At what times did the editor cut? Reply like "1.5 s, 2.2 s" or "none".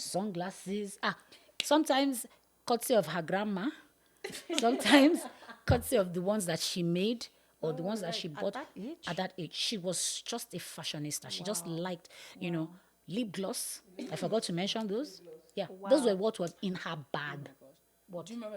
none